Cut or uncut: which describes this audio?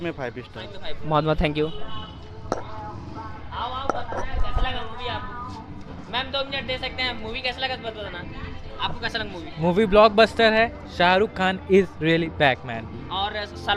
uncut